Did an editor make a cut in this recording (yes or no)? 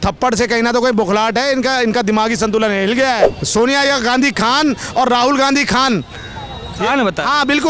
yes